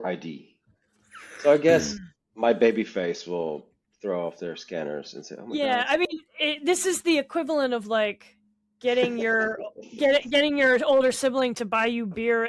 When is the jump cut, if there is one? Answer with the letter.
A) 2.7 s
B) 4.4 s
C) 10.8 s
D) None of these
D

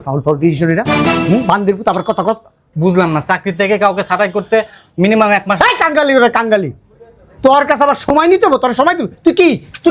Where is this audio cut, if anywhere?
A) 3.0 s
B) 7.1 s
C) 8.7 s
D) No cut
D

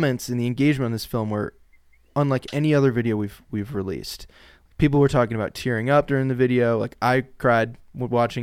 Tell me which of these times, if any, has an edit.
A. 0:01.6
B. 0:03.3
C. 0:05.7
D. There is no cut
D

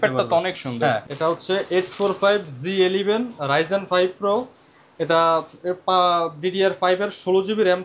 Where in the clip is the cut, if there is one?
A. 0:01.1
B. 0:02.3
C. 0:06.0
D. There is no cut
A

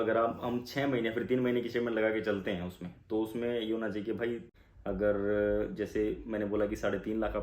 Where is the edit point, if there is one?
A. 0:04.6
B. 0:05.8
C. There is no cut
A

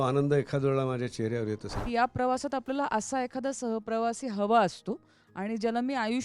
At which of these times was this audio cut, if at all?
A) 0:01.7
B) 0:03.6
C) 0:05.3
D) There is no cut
A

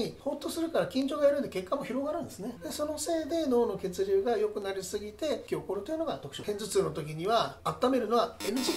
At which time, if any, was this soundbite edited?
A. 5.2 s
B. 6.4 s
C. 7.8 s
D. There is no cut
B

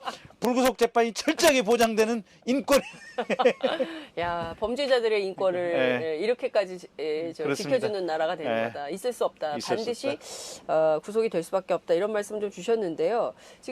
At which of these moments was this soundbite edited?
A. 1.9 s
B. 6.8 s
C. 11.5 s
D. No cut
C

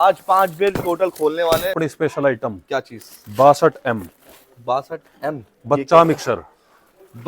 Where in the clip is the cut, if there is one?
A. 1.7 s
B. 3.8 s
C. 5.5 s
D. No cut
A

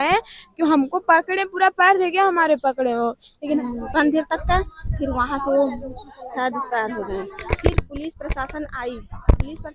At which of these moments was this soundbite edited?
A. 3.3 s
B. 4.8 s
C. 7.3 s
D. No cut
A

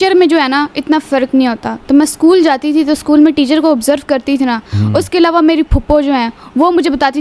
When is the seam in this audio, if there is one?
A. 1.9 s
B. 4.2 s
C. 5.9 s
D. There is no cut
D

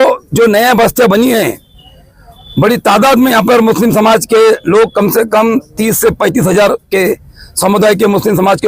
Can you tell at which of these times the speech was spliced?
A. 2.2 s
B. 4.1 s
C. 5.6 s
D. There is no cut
D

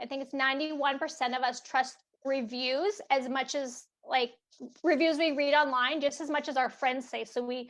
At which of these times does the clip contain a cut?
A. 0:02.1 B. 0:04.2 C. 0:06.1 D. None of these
D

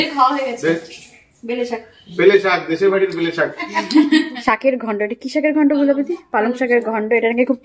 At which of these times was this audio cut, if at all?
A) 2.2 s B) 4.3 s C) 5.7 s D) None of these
B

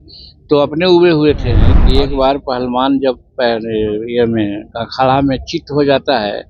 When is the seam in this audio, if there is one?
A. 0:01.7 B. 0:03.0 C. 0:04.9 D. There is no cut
A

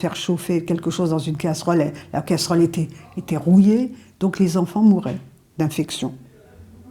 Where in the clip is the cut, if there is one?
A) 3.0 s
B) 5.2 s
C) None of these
C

